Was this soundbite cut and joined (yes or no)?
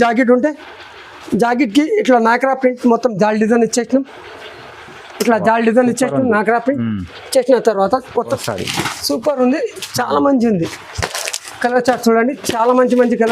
yes